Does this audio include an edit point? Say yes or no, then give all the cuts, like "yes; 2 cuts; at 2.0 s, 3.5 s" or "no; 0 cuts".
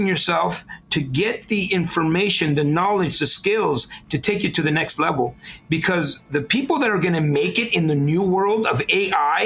yes; 1 cut; at 6.2 s